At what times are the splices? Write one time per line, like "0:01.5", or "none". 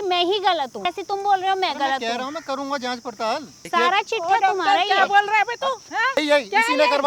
0:01.0
0:03.5
0:06.2

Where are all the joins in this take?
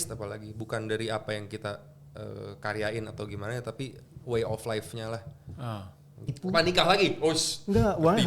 0:06.4

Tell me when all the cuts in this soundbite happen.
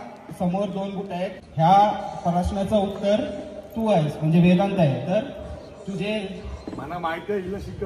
0:01.4

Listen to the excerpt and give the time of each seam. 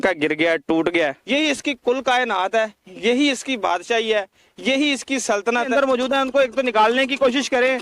0:01.2
0:05.7

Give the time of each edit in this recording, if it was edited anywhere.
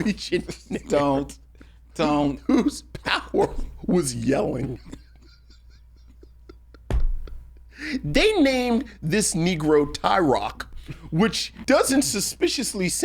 0:11.5

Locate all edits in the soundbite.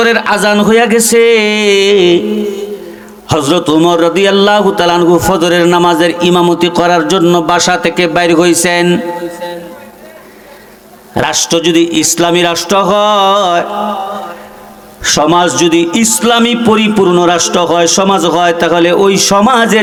none

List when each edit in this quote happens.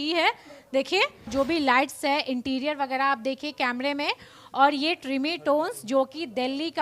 0:01.3

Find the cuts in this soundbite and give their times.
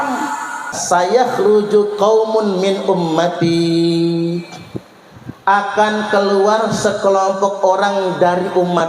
0:01.1

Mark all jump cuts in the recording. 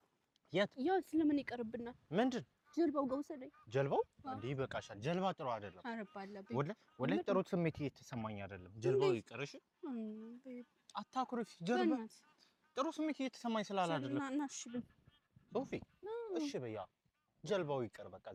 none

